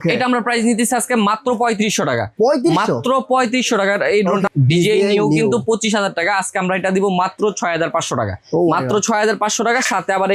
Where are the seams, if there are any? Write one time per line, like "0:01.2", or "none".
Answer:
0:04.5